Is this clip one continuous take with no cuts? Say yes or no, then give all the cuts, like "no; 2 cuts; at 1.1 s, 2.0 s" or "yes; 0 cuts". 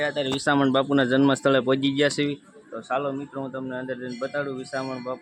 yes; 0 cuts